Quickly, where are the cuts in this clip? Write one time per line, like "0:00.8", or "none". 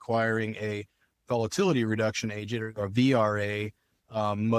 0:01.1